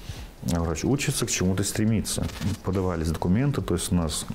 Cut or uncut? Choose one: cut